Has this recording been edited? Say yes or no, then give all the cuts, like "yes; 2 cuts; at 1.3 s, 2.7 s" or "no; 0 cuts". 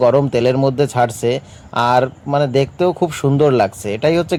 no; 0 cuts